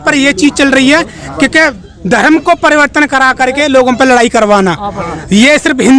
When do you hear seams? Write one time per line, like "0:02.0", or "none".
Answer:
none